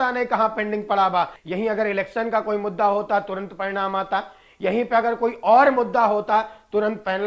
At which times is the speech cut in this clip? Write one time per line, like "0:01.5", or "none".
0:01.4